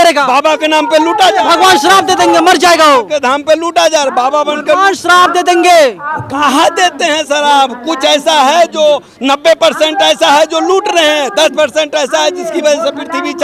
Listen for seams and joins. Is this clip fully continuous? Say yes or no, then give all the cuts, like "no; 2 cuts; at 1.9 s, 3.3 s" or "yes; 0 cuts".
yes; 0 cuts